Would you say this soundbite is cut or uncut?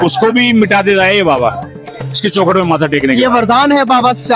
uncut